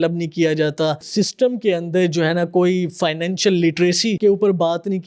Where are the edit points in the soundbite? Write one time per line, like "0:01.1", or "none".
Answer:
0:01.1
0:04.2